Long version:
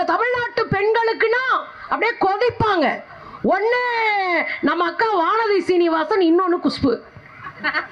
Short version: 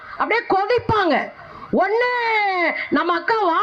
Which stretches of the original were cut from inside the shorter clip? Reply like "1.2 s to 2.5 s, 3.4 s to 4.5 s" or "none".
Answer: none